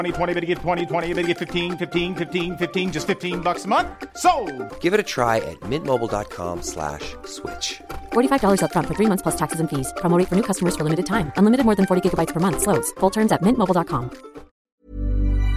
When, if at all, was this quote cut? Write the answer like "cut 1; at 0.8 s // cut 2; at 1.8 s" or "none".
cut 1; at 14.6 s